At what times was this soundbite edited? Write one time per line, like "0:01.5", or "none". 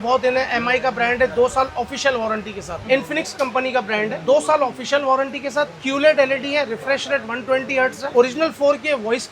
0:02.7